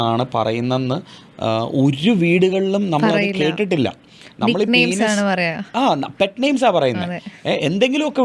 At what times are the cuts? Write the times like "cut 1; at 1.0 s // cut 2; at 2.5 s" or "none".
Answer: none

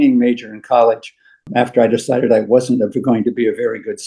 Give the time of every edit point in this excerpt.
none

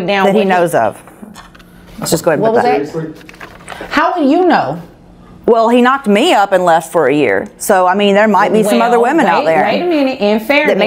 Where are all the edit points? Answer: none

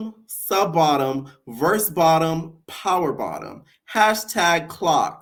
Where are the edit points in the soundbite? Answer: none

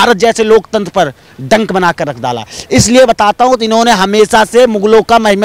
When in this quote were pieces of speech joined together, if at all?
none

